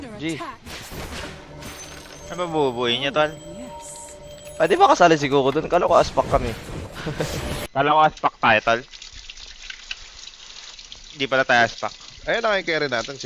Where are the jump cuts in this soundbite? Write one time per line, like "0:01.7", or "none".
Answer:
0:07.6